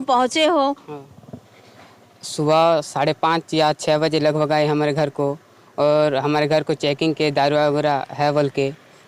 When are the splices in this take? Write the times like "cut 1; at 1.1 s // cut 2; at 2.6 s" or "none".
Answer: none